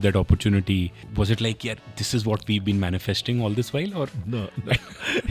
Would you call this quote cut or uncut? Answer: cut